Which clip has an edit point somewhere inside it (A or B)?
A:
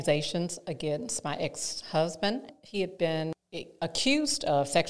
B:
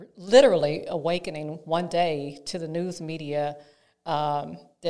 A